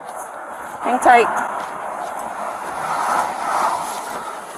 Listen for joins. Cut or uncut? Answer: uncut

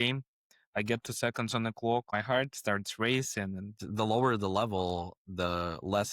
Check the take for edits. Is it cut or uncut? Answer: cut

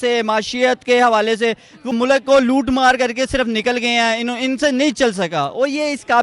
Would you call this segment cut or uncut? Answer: cut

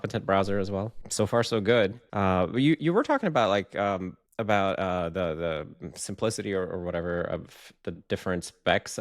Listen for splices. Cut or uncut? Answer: cut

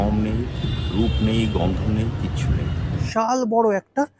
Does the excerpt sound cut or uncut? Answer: cut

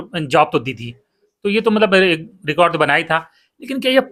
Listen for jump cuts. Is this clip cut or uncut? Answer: uncut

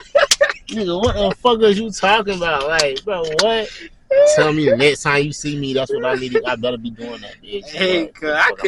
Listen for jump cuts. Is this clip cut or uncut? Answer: uncut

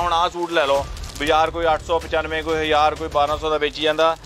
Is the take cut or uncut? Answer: uncut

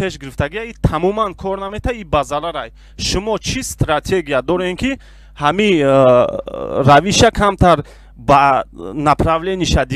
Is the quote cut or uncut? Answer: uncut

